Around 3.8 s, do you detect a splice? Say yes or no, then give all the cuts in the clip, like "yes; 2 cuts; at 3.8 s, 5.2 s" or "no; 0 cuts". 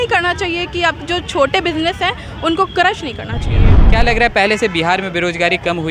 yes; 1 cut; at 3.8 s